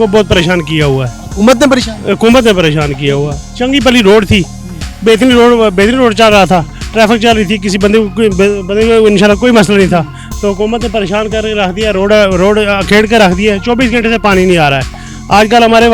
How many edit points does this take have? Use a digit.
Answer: 0